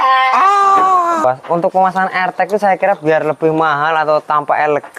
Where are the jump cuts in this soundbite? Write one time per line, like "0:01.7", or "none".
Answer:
0:01.2